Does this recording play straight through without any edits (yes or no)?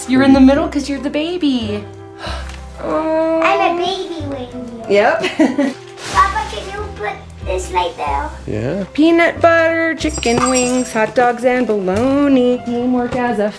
no